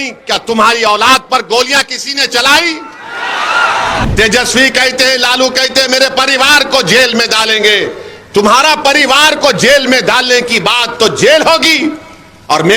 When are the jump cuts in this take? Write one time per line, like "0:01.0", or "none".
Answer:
0:04.1